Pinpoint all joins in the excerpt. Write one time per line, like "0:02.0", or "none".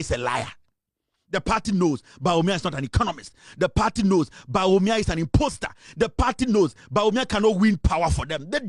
none